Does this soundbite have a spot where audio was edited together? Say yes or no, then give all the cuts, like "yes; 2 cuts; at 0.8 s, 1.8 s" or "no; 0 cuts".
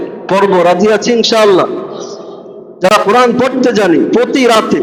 no; 0 cuts